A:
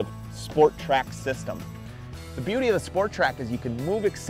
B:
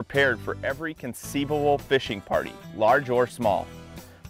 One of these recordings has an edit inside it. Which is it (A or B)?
A